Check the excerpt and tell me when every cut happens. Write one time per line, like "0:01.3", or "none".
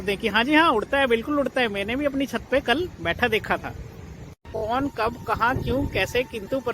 0:04.5